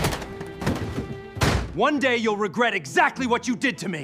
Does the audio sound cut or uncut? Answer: uncut